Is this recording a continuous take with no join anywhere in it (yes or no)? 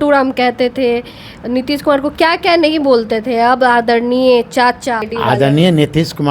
no